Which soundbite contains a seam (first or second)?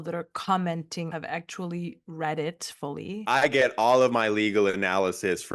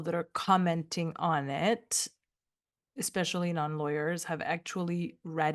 first